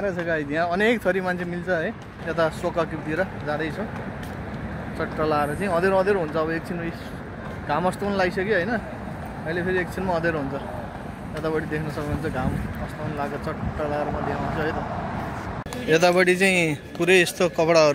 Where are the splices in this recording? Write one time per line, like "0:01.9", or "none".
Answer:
0:02.2
0:15.6